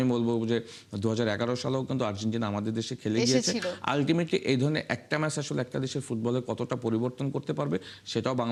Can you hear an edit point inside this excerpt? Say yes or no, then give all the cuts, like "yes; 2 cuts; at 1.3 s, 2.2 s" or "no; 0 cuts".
no; 0 cuts